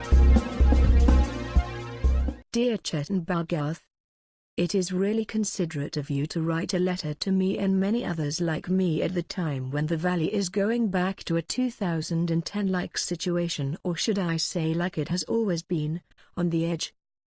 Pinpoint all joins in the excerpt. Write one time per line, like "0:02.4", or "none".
0:02.2
0:09.3